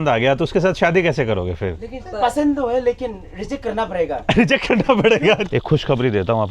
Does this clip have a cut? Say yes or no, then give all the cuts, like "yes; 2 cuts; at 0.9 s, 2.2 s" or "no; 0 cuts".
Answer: yes; 1 cut; at 5.5 s